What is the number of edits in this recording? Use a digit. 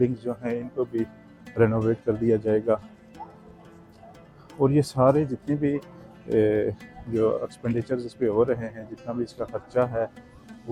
0